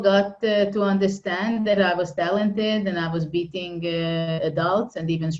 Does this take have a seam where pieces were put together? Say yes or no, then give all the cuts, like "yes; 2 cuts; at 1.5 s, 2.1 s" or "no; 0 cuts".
no; 0 cuts